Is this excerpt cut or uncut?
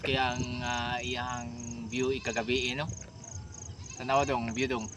uncut